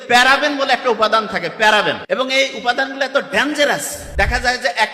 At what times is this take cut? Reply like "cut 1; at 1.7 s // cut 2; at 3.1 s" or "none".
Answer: cut 1; at 2.0 s // cut 2; at 4.0 s